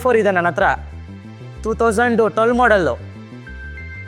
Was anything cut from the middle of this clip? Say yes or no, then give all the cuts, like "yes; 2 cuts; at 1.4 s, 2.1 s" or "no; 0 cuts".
no; 0 cuts